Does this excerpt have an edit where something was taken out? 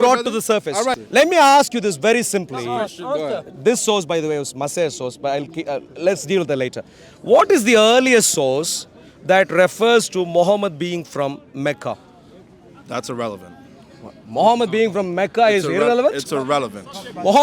yes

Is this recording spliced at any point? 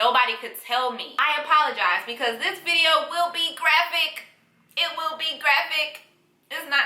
yes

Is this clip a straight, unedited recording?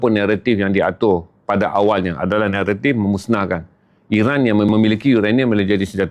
no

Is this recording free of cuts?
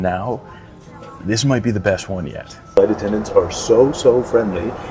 no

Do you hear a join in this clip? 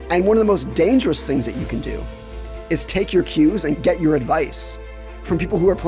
no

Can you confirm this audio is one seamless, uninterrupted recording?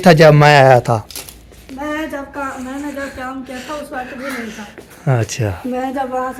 yes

